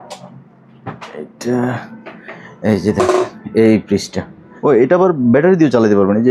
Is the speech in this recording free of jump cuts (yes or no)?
no